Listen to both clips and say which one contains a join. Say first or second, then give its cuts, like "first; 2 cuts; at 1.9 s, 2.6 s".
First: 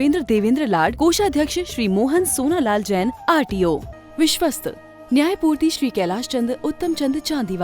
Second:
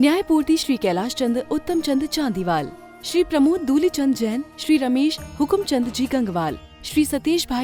first; 1 cut; at 3.9 s